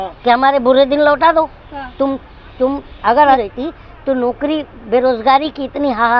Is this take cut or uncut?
cut